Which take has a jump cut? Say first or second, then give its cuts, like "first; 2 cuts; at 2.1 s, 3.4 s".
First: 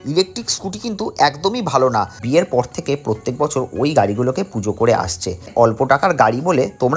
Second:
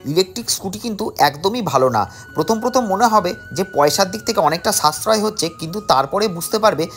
first; 2 cuts; at 2.2 s, 5.5 s